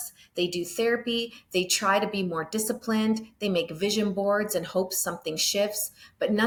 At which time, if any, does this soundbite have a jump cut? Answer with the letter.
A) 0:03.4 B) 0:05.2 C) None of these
C